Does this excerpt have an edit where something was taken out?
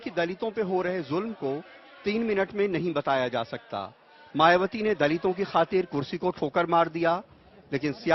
no; 0 cuts

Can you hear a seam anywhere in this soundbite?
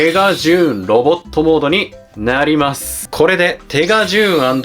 yes; 1 cut; at 3.0 s

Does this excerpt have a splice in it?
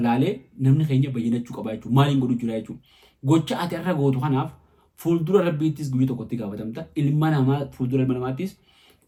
no; 0 cuts

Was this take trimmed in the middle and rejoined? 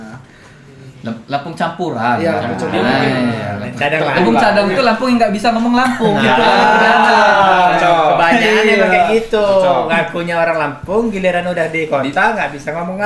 no; 0 cuts

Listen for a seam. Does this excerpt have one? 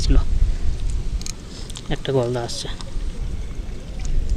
yes; 2 cuts; at 1.3 s, 3.2 s

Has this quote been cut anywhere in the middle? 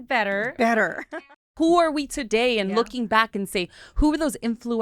yes; 1 cut; at 1.5 s

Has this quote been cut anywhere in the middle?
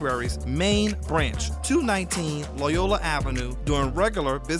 no; 0 cuts

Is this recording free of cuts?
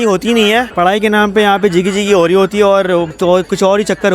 yes; 0 cuts

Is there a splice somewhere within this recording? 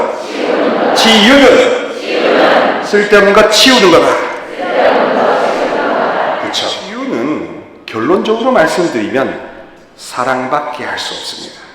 yes; 1 cut; at 7.0 s

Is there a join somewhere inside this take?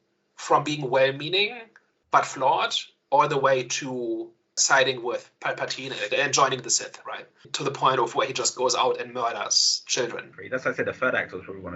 no; 0 cuts

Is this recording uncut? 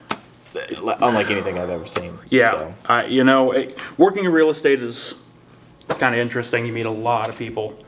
yes; 0 cuts

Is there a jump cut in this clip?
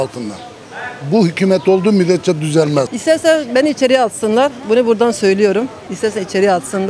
yes; 1 cut; at 2.9 s

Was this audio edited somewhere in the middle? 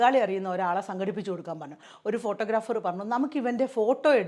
yes; 1 cut; at 1.8 s

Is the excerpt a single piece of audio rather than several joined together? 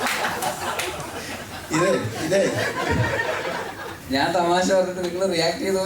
no; 1 cut; at 3.9 s

